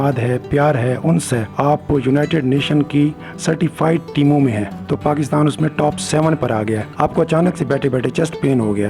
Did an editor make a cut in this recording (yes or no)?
yes